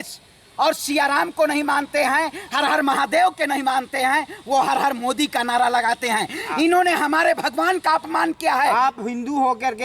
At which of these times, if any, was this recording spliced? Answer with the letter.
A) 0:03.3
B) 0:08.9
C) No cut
C